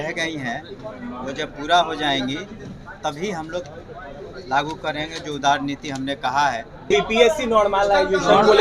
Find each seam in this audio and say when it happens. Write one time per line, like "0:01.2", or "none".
0:06.9